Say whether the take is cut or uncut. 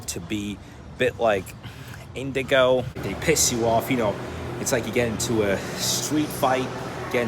cut